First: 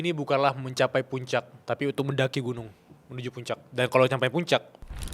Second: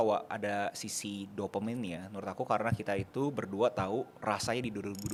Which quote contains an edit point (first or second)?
first